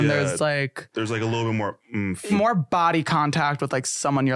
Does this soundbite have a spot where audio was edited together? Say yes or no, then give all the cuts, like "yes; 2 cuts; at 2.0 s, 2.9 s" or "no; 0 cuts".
yes; 1 cut; at 2.3 s